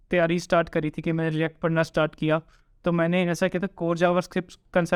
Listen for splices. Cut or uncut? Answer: uncut